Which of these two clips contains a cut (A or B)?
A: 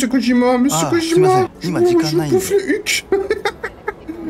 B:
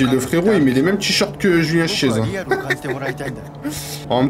A